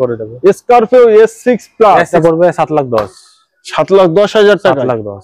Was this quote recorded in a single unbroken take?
no; 1 cut; at 2.1 s

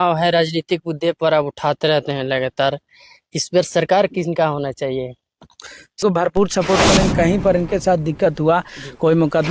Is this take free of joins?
no; 1 cut; at 6.0 s

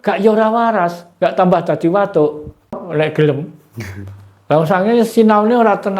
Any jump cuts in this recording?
yes; 1 cut; at 2.8 s

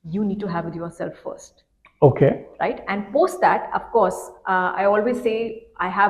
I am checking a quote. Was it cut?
no; 0 cuts

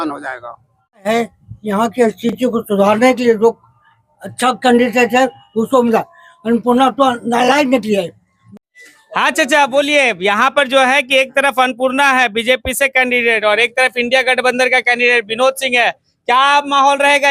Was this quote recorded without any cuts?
no; 2 cuts; at 1.0 s, 8.6 s

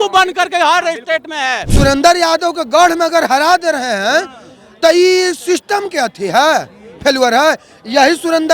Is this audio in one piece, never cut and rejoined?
no; 1 cut; at 1.7 s

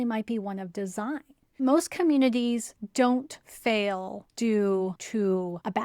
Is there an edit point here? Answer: yes; 4 cuts; at 1.6 s, 3.1 s, 4.2 s, 5.0 s

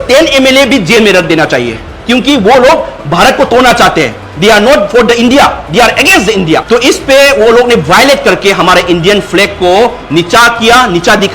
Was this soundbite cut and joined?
yes; 1 cut; at 6.6 s

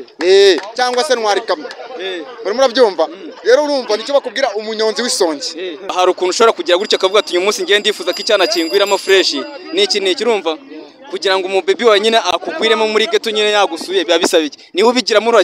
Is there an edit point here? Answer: yes; 2 cuts; at 5.9 s, 12.3 s

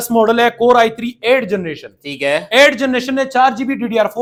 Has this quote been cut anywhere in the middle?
no; 0 cuts

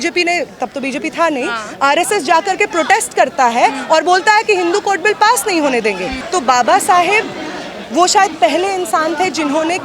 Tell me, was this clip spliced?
yes; 1 cut; at 6.2 s

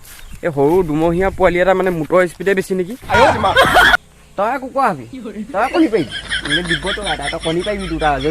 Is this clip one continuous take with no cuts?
no; 1 cut; at 4.0 s

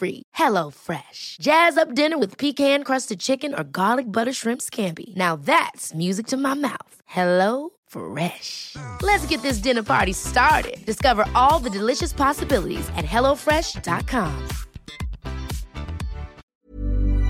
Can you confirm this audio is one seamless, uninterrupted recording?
no; 1 cut; at 16.4 s

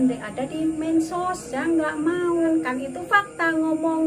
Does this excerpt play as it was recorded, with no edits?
yes; 0 cuts

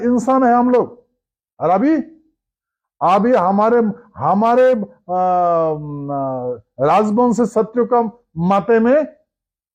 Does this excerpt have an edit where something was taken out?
no; 0 cuts

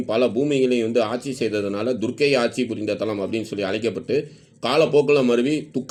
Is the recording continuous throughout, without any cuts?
yes; 0 cuts

